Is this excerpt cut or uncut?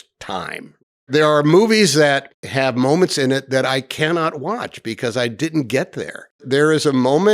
cut